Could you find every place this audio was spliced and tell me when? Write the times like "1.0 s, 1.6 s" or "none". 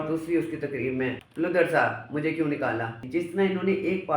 1.2 s, 3.0 s